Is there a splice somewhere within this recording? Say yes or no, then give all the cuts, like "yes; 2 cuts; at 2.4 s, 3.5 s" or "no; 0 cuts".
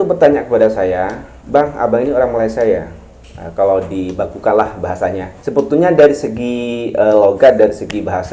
yes; 1 cut; at 5.3 s